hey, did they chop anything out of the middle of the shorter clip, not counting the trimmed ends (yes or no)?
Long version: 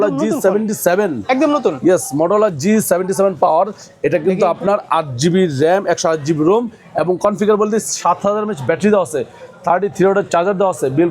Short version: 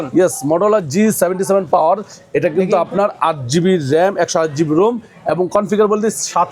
no